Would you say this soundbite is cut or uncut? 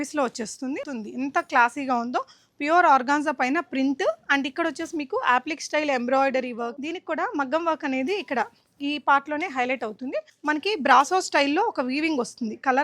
cut